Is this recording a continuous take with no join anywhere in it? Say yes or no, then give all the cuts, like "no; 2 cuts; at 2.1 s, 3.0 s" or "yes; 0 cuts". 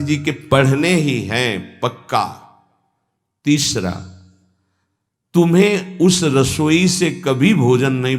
yes; 0 cuts